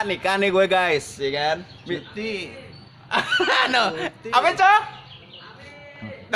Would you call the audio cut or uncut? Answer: uncut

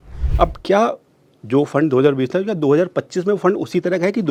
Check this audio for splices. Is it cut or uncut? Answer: uncut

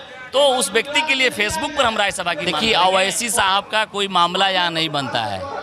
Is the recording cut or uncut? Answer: cut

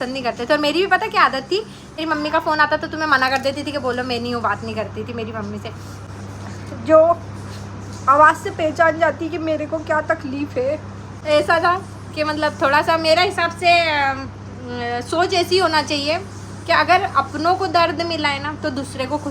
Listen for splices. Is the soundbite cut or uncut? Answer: cut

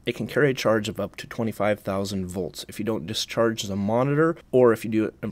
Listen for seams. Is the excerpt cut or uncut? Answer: cut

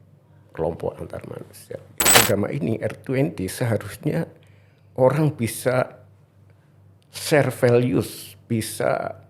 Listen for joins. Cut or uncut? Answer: cut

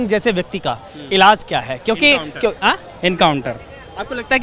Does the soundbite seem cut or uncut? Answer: uncut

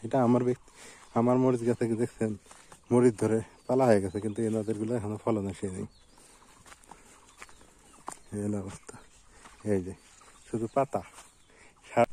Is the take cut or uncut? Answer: uncut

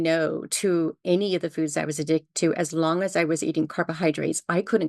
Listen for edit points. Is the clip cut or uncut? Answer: uncut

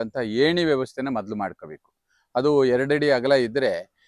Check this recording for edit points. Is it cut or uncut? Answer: uncut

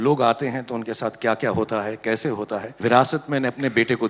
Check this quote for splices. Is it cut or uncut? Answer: cut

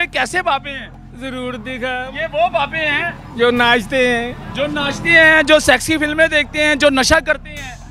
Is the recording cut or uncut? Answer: uncut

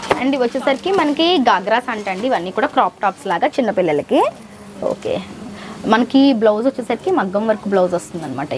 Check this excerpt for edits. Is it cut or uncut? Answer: uncut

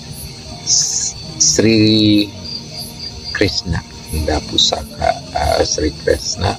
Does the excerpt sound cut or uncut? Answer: cut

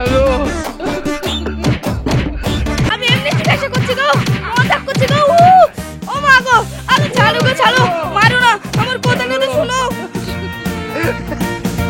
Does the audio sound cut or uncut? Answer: cut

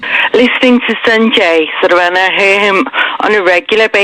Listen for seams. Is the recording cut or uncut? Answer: uncut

